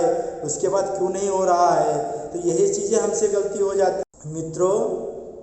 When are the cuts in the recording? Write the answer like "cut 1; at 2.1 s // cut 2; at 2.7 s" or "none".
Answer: cut 1; at 4.0 s